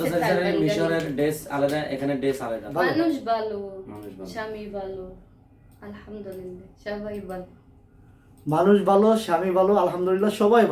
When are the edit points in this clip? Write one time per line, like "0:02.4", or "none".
0:02.6